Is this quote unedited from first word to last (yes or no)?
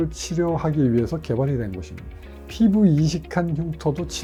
yes